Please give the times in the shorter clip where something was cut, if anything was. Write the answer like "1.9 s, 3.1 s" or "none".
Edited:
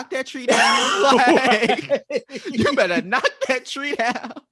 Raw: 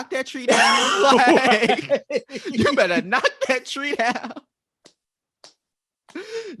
none